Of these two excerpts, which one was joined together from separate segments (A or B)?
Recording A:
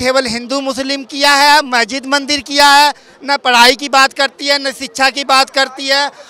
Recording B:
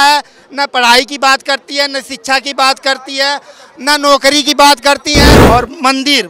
B